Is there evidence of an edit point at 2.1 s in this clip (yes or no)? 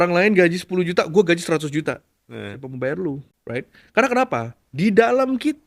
no